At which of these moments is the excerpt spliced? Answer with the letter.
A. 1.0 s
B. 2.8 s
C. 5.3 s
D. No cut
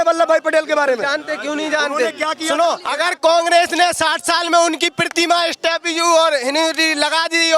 B